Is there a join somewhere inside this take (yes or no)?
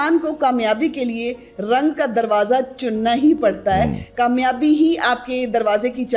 yes